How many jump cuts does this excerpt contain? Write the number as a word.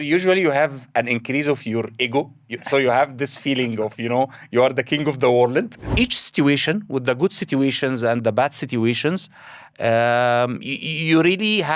one